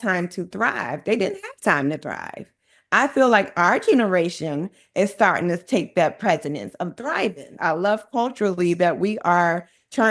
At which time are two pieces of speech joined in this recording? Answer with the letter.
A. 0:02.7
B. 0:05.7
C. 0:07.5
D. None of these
C